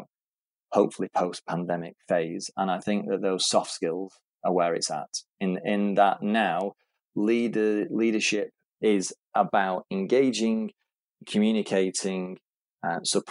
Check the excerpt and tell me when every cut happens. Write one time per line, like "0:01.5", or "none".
none